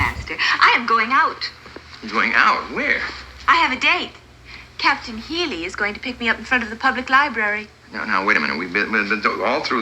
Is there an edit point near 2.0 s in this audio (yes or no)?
no